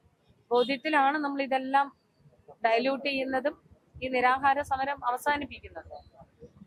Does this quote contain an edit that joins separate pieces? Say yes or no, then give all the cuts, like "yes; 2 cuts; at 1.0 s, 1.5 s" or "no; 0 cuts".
no; 0 cuts